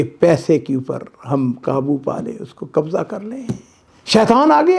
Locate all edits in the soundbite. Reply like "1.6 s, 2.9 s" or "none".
none